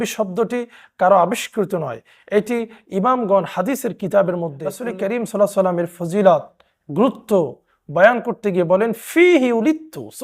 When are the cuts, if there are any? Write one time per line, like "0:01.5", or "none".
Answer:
0:04.8

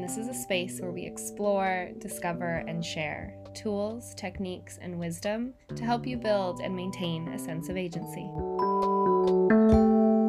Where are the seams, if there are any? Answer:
none

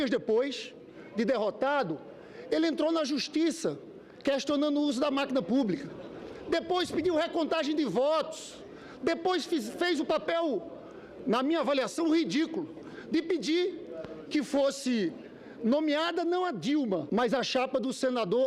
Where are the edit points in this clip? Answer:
0:13.5

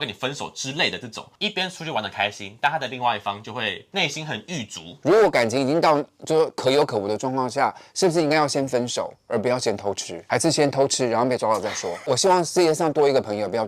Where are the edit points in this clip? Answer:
0:01.3
0:04.9
0:12.0

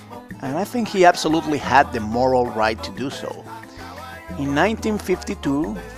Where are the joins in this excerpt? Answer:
0:04.2

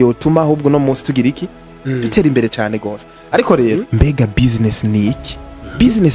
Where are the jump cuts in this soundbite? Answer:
0:03.9

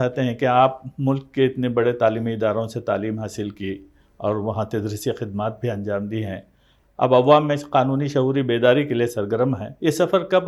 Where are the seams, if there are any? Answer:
none

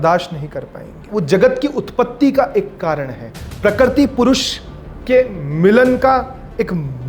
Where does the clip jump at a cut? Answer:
0:01.0

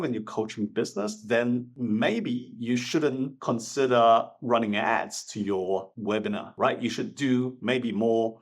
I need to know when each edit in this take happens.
none

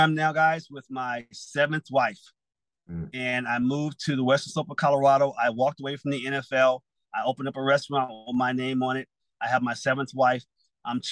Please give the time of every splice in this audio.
none

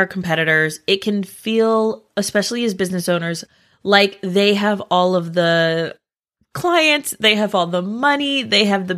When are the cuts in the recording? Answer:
none

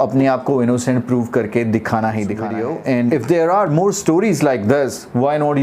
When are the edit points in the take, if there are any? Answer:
0:02.5

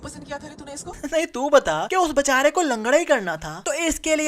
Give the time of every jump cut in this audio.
0:01.0

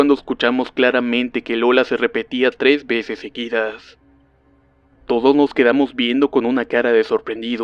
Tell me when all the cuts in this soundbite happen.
none

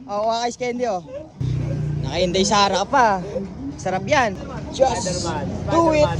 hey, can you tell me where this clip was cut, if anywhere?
0:01.4
0:04.5

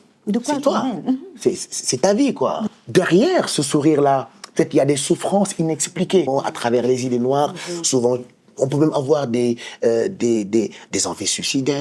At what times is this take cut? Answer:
0:02.7
0:06.3

